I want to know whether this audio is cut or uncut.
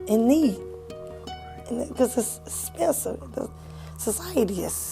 uncut